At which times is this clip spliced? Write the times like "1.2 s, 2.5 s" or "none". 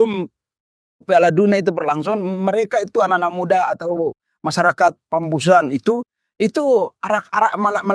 none